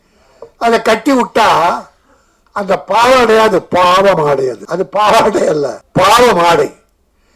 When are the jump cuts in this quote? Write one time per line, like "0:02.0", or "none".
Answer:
0:04.6
0:05.8